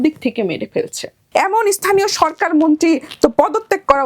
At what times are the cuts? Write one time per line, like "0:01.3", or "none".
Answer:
0:01.2